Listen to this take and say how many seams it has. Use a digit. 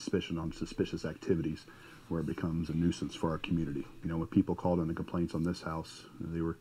0